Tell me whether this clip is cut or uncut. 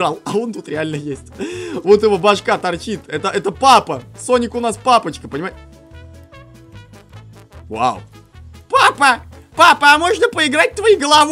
uncut